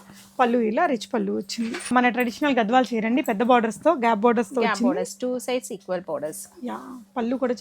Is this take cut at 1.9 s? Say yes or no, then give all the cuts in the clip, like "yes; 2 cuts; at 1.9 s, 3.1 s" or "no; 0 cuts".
yes; 1 cut; at 1.9 s